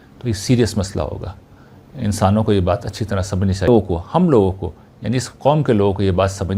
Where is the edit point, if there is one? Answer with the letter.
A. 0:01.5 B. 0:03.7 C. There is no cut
B